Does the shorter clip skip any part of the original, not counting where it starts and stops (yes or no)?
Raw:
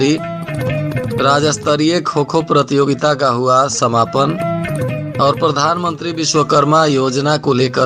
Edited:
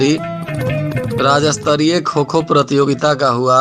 no